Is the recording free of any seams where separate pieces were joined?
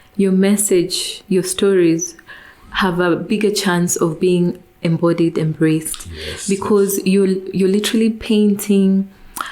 yes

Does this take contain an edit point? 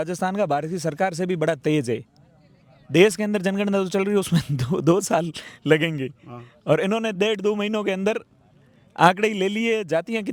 no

